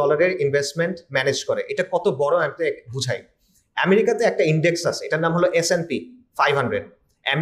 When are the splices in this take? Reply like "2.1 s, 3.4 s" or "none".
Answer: none